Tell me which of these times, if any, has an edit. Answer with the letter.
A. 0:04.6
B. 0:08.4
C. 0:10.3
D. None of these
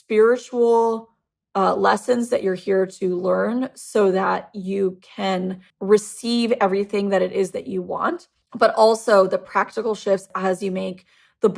C